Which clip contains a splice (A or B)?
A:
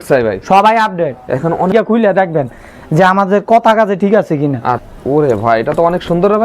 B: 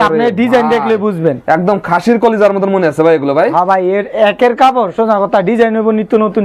A